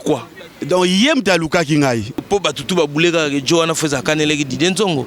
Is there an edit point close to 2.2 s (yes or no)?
yes